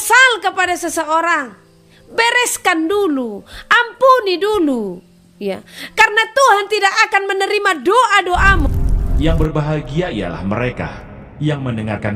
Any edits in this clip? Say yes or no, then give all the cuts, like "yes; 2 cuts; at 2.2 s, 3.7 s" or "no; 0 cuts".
yes; 1 cut; at 8.6 s